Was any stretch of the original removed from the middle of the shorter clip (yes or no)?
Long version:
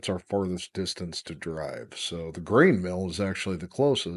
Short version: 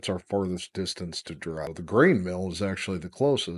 yes